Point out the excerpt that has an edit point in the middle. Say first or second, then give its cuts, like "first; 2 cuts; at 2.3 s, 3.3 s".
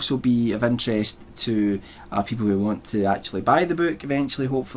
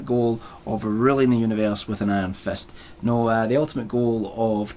first; 1 cut; at 1.1 s